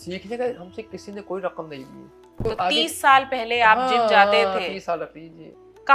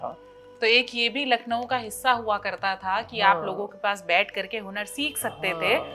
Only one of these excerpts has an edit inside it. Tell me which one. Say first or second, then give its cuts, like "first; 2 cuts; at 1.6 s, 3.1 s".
first; 1 cut; at 2.4 s